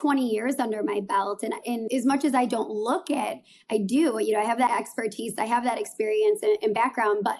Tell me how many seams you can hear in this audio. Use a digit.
2